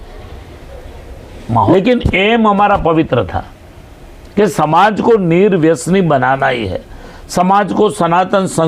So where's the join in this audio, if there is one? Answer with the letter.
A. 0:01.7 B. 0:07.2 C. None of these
A